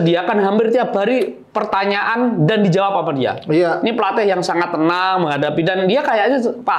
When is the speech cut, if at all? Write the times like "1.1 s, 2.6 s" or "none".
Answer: none